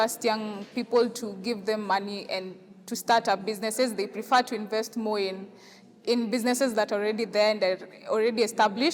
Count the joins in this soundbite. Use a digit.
0